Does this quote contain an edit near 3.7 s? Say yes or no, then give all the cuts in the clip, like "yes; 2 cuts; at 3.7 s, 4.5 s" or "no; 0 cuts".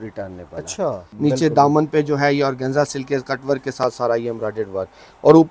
no; 1 cut; at 1.1 s